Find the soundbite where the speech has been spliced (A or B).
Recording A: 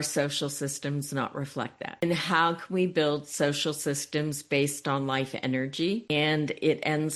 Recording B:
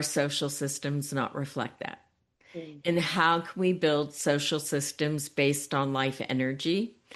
A